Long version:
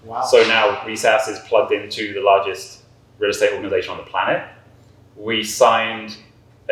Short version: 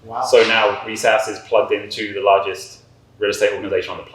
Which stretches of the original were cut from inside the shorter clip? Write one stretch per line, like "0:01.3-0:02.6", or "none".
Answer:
none